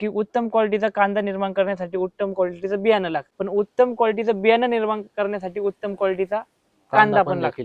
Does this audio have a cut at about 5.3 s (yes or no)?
no